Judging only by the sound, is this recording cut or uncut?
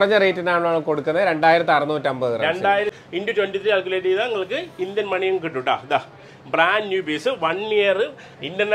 cut